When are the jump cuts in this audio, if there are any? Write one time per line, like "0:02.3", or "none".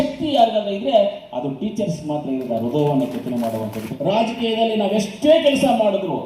0:03.8